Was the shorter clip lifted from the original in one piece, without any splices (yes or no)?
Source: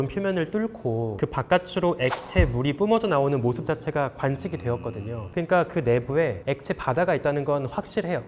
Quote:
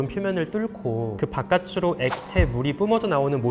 yes